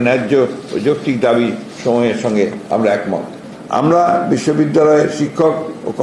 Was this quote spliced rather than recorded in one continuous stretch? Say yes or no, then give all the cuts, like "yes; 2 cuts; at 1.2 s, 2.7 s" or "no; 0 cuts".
yes; 1 cut; at 3.4 s